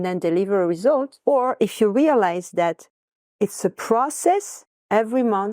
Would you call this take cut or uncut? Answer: cut